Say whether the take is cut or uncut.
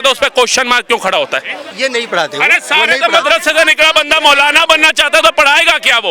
cut